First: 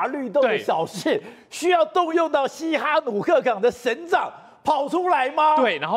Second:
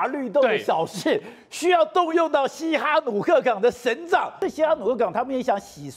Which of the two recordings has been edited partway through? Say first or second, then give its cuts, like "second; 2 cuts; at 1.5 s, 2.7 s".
second; 1 cut; at 4.3 s